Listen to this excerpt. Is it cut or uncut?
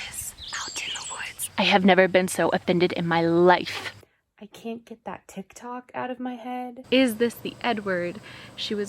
cut